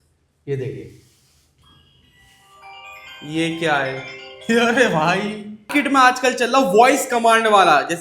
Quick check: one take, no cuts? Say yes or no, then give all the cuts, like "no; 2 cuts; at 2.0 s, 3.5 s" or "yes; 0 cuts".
no; 1 cut; at 5.7 s